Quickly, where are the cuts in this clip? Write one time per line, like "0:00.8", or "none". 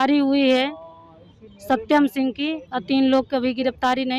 none